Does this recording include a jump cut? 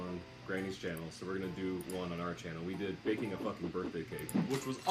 yes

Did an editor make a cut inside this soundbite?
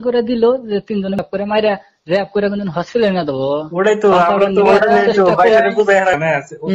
yes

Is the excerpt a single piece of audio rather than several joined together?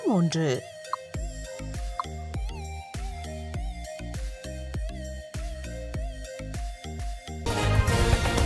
no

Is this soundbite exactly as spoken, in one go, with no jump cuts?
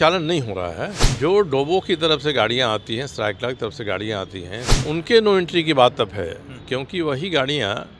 no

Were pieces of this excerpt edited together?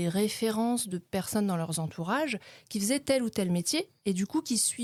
no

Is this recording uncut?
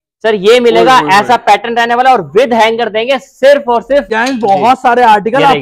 no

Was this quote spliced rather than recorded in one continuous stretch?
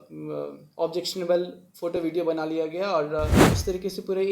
yes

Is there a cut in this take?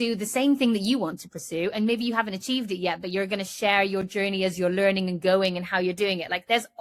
no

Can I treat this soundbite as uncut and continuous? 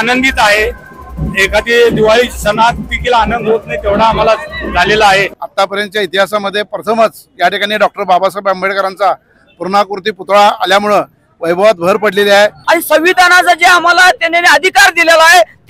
no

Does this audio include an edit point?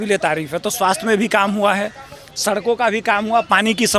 no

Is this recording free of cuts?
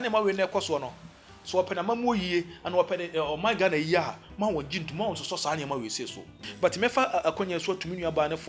no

